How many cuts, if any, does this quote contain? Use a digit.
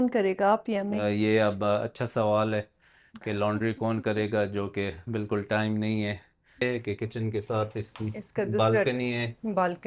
1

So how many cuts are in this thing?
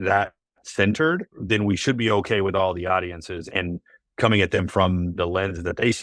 3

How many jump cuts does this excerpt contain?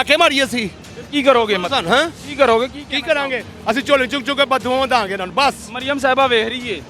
0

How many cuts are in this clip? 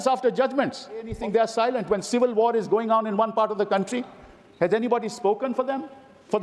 1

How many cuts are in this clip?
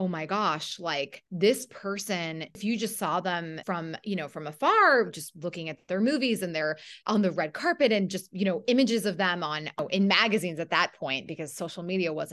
4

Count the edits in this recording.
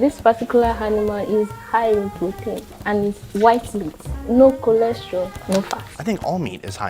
0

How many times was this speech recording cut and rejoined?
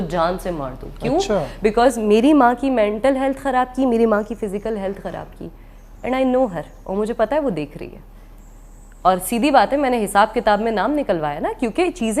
0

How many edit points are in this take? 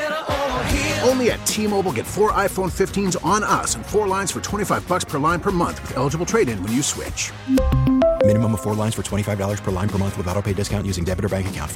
0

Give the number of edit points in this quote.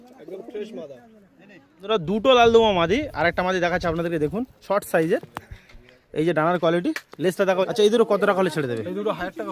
2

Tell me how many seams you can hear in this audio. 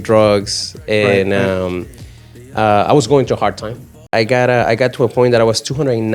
1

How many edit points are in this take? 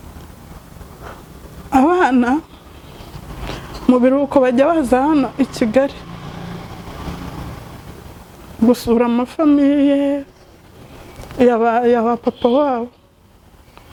0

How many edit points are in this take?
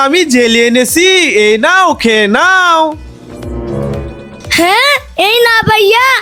0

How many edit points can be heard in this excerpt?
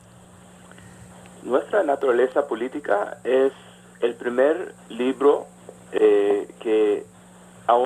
1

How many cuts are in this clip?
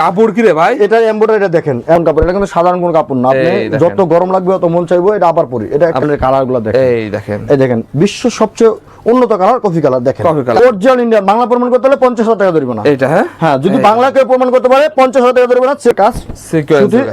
4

